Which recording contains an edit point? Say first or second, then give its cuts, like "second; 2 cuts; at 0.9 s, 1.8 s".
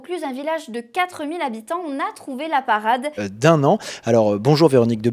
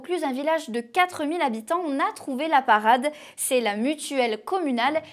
second; 1 cut; at 3.3 s